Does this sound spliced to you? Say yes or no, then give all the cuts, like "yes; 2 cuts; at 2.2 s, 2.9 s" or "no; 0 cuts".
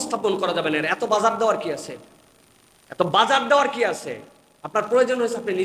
no; 0 cuts